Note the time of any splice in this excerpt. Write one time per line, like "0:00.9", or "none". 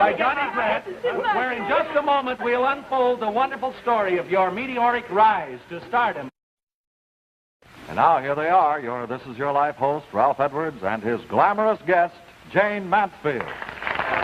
0:09.2